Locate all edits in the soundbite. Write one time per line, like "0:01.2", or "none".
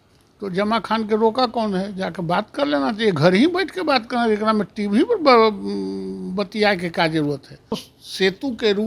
0:07.9